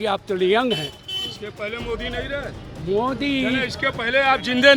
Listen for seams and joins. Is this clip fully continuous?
yes; 0 cuts

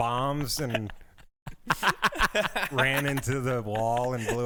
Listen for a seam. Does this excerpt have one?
no; 0 cuts

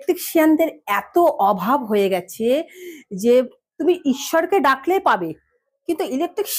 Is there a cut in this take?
no; 0 cuts

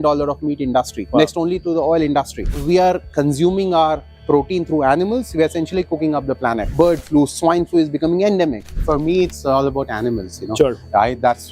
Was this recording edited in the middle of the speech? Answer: yes; 3 cuts; at 2.5 s, 6.7 s, 8.8 s

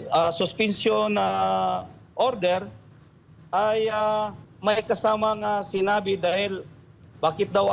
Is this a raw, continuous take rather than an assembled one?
no; 1 cut; at 4.4 s

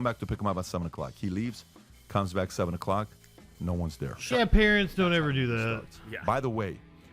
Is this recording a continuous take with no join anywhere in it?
yes; 0 cuts

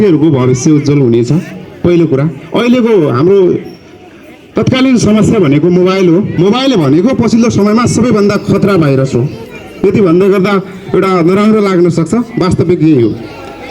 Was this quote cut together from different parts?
yes; 1 cut; at 6.3 s

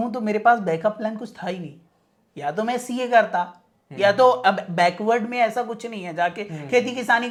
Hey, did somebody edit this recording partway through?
no; 0 cuts

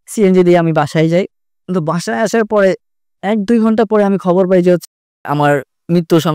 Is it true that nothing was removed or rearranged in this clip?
yes; 0 cuts

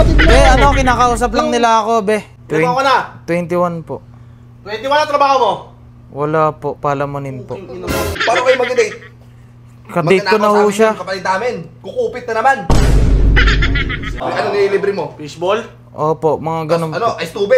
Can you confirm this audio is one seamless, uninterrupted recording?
no; 3 cuts; at 2.3 s, 8.2 s, 14.2 s

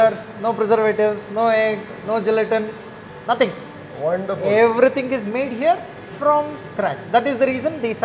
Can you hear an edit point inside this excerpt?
no; 0 cuts

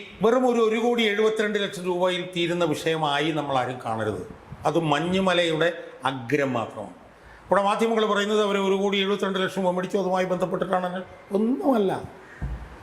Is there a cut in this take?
no; 0 cuts

